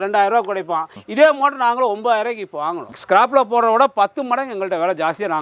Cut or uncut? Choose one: uncut